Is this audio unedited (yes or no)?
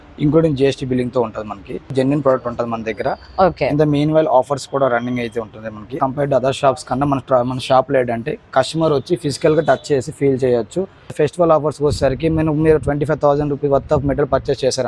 no